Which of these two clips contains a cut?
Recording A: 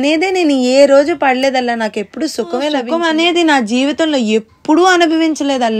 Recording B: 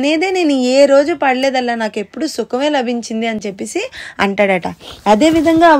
A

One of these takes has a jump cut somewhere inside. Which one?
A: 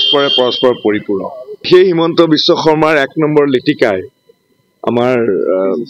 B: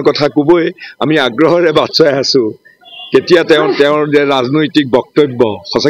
A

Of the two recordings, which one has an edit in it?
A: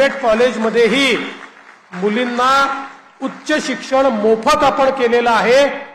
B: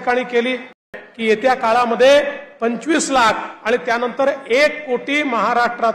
B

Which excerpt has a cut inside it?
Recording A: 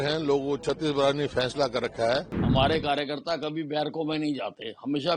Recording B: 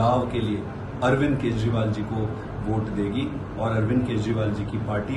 A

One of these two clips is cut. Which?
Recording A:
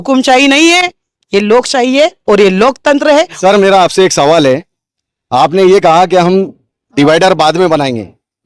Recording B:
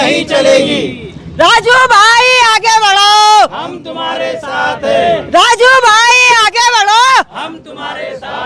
A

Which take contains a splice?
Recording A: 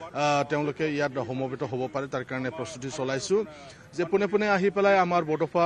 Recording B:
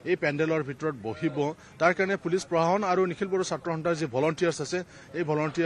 B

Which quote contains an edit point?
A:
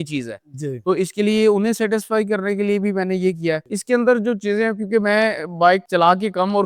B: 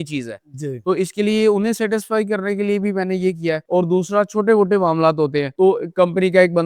A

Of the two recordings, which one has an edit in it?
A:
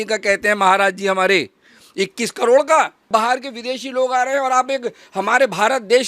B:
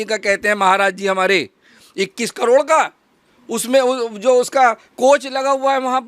A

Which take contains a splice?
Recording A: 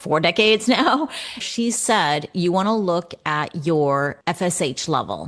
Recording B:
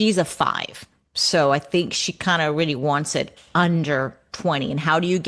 A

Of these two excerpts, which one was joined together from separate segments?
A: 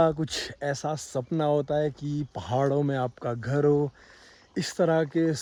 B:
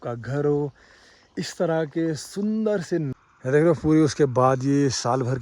B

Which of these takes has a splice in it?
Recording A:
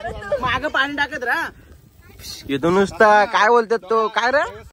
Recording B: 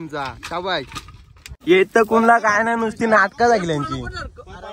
B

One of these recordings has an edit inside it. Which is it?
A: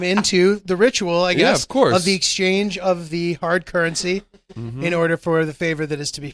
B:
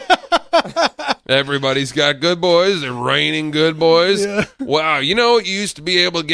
B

